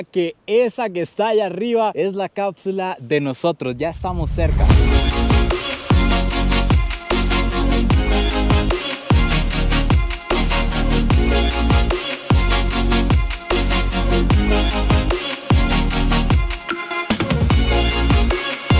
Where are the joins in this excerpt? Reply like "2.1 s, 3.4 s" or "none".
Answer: none

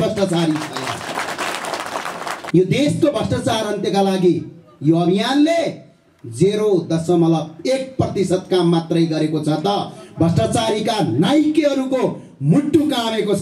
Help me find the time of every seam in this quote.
2.3 s

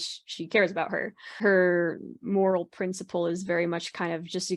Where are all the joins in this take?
1.4 s

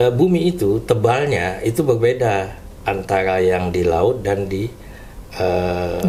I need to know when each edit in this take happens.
none

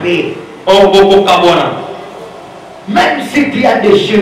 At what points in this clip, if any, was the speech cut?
none

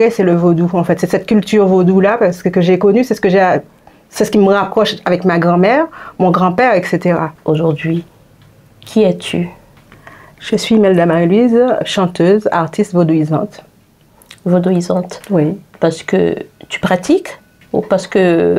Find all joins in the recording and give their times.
7.3 s, 15.7 s

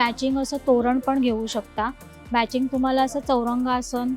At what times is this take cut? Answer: none

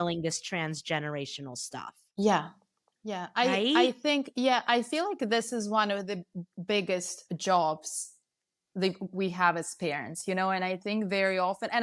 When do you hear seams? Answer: none

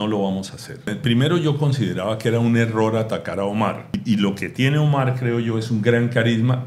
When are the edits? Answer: 1.0 s, 3.9 s

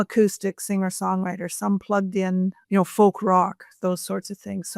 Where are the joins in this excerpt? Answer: 2.6 s

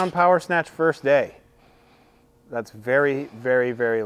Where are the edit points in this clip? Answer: none

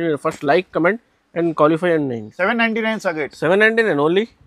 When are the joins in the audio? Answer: 2.2 s

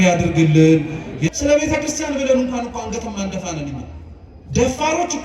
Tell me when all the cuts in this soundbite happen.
1.2 s

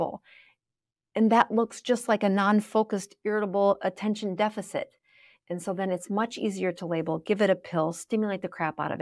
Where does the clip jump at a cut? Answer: none

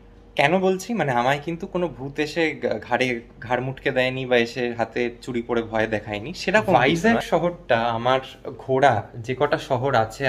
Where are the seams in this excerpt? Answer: 6.9 s

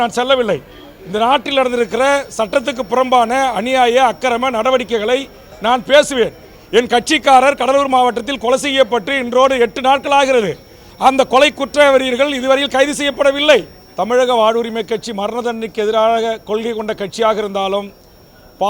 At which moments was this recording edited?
13.8 s

